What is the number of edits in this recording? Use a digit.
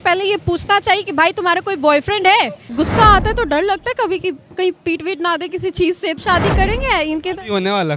2